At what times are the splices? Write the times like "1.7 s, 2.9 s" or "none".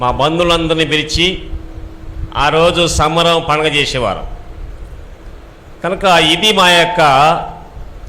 none